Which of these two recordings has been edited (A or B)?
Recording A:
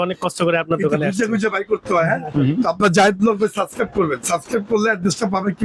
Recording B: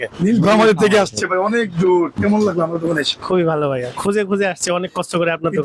B